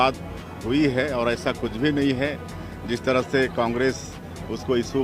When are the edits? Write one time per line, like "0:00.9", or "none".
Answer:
none